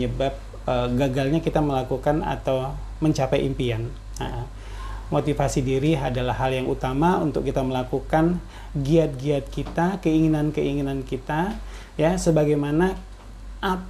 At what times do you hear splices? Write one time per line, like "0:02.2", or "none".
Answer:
none

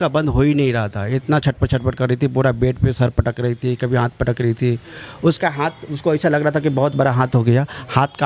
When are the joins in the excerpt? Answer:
none

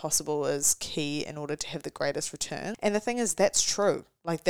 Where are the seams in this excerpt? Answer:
0:02.8

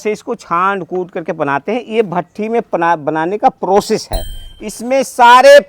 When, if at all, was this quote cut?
0:04.5

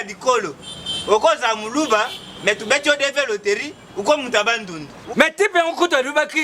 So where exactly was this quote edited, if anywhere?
0:05.0

